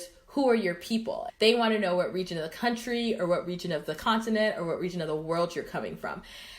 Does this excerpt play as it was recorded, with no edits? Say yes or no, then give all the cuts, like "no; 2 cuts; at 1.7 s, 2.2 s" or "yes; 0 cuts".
no; 1 cut; at 1.2 s